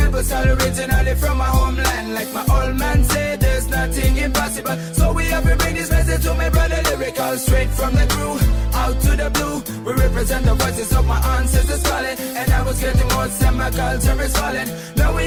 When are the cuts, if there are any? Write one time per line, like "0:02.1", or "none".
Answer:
none